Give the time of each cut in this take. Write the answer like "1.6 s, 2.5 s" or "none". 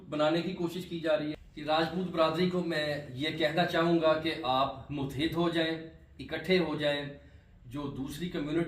1.5 s